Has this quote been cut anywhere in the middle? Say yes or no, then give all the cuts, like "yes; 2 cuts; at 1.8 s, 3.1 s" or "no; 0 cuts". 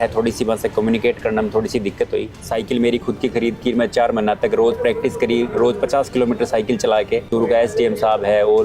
yes; 2 cuts; at 2.4 s, 7.3 s